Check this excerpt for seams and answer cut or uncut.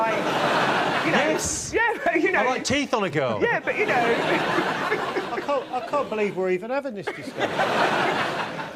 uncut